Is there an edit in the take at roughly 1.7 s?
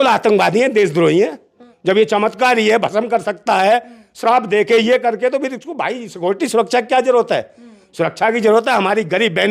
yes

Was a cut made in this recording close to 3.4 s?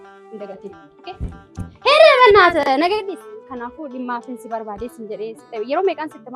yes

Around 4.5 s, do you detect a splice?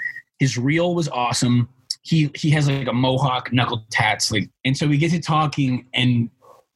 yes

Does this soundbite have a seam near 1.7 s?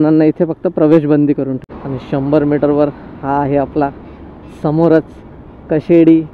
yes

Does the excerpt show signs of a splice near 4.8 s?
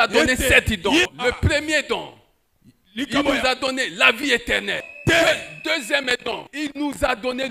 yes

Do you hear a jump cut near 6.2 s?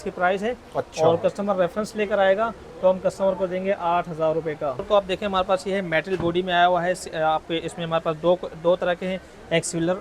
no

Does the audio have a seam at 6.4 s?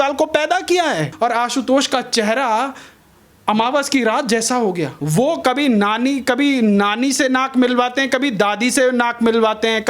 no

